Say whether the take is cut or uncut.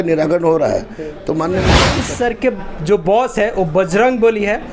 cut